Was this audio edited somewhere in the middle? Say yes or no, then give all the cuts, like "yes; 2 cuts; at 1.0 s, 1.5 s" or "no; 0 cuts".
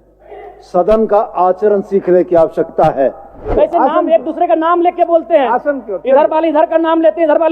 yes; 1 cut; at 3.5 s